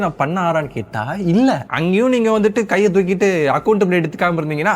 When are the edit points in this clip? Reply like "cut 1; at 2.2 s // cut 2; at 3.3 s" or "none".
cut 1; at 1.7 s